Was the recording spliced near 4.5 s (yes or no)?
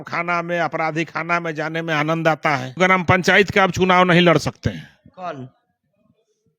no